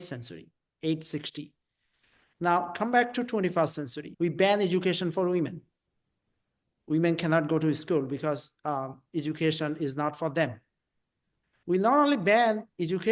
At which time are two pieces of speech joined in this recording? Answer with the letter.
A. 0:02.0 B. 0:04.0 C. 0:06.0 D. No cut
B